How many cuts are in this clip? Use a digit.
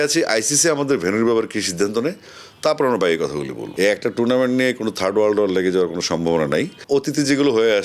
2